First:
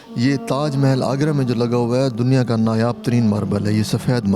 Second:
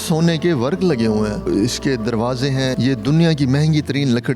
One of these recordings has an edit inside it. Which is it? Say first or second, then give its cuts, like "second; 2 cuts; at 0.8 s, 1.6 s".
second; 2 cuts; at 1.5 s, 2.7 s